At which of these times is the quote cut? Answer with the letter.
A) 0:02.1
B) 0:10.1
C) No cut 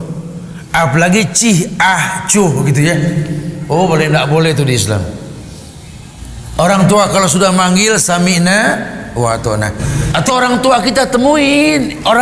B